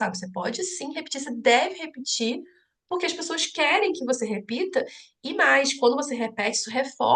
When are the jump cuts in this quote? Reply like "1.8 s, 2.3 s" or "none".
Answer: none

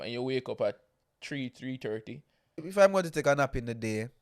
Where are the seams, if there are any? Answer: 2.7 s

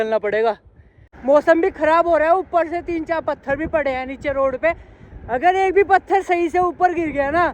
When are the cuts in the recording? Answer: 1.0 s

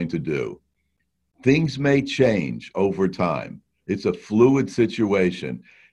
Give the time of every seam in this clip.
1.1 s

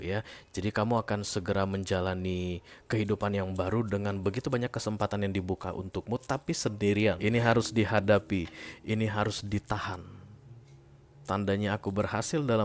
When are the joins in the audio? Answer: 7.2 s

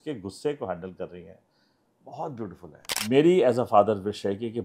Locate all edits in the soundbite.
3.0 s

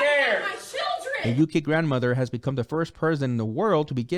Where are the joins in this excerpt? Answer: 1.1 s

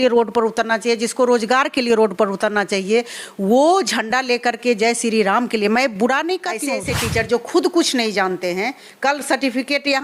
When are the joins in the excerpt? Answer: 6.7 s

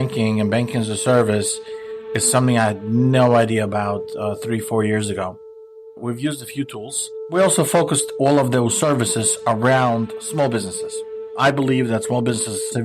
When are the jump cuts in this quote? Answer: 7.3 s

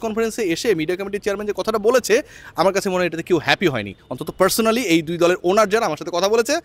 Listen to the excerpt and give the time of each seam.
none

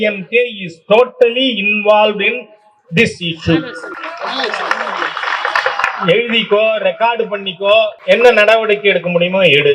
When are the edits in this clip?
none

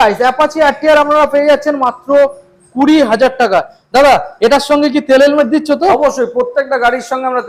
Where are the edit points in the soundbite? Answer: none

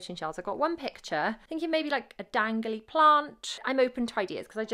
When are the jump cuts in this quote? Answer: 1.4 s, 3.6 s

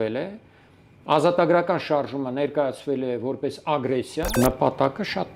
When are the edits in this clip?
4.3 s

